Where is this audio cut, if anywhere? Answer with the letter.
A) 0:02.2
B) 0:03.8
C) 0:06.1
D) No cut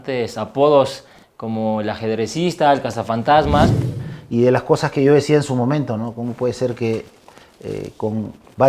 B